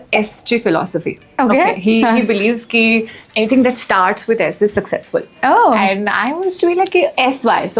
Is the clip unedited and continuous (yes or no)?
yes